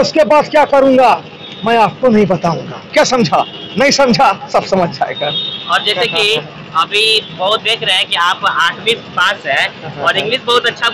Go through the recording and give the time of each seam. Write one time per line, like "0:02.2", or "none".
none

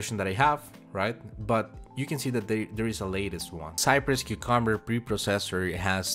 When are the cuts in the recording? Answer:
0:03.7

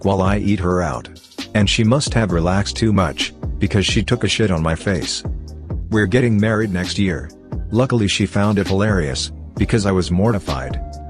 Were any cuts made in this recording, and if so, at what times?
none

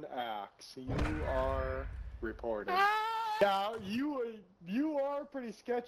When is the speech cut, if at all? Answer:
0:03.4

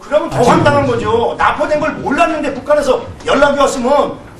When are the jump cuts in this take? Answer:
0:01.4

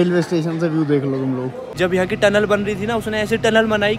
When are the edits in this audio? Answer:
0:01.6

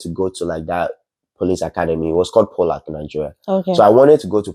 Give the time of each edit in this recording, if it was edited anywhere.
none

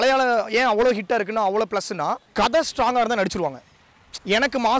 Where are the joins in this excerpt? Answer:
0:02.2

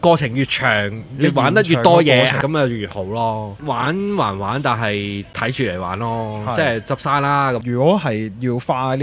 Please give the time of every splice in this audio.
0:02.4
0:03.6
0:05.3
0:07.6

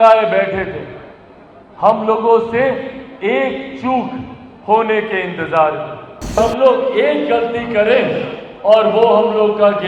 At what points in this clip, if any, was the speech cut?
0:06.4

